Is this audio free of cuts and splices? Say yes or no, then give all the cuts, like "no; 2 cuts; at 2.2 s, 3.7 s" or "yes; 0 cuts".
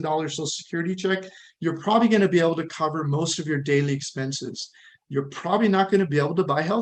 yes; 0 cuts